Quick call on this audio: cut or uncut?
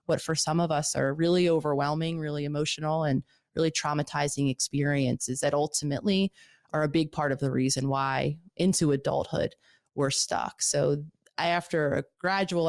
uncut